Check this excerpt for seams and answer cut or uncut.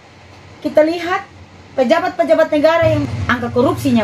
cut